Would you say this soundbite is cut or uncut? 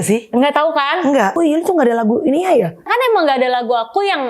cut